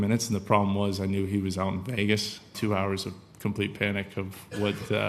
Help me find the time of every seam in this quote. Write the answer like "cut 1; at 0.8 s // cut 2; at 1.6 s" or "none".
none